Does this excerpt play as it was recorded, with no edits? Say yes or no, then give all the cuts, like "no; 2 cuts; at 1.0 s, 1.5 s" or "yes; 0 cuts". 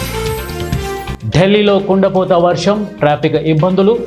no; 1 cut; at 1.1 s